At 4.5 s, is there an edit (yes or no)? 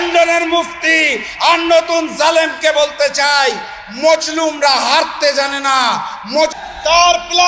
no